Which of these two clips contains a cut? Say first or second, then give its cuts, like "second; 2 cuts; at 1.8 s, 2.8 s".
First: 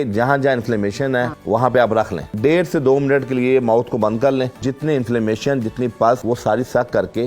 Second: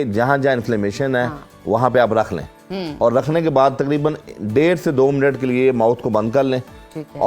first; 4 cuts; at 1.4 s, 2.2 s, 4.7 s, 6.2 s